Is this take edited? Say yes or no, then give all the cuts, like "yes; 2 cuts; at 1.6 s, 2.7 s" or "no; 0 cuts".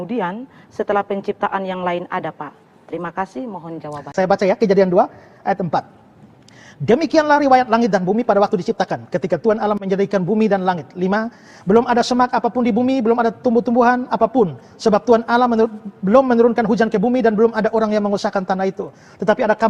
yes; 1 cut; at 4.1 s